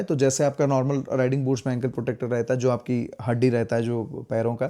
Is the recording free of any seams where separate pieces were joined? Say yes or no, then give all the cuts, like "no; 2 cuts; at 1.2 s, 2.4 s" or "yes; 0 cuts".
yes; 0 cuts